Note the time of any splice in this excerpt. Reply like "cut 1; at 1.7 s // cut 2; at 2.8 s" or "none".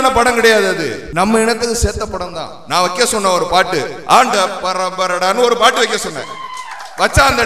cut 1; at 1.0 s